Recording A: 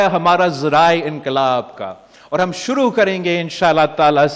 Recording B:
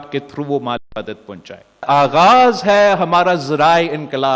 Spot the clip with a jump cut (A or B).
B